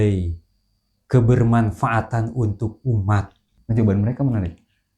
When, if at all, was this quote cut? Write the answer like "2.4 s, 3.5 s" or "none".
3.5 s